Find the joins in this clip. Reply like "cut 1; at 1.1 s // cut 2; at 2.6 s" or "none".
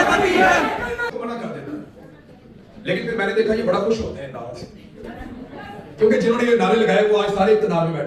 cut 1; at 1.1 s